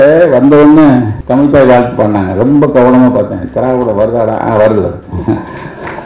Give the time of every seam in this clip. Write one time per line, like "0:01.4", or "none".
0:01.2

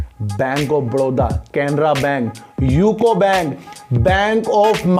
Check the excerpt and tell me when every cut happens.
none

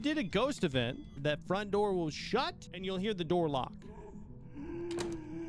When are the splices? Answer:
0:01.2
0:02.7

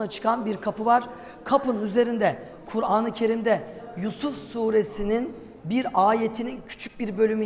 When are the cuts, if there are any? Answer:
none

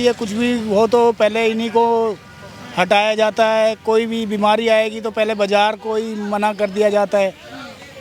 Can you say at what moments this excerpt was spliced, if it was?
none

